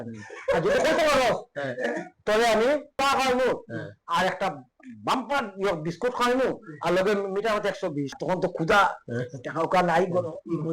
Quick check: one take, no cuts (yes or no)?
no